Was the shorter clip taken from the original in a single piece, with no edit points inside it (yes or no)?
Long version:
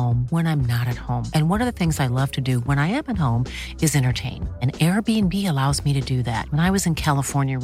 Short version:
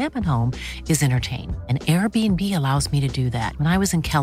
yes